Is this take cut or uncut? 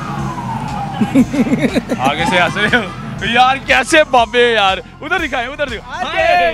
uncut